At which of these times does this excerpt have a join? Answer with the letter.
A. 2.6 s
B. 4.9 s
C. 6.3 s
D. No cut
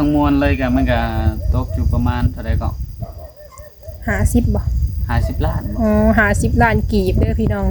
D